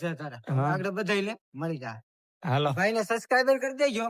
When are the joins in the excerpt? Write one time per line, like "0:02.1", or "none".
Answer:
none